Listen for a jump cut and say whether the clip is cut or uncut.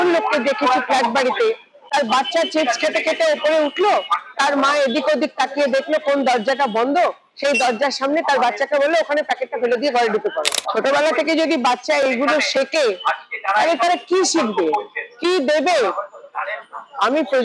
uncut